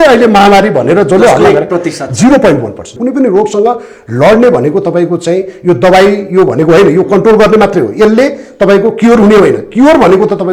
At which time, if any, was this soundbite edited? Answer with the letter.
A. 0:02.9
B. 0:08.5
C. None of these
A